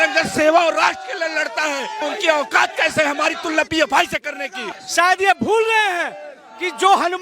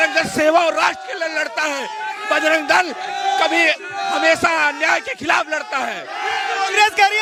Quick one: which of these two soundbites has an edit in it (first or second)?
first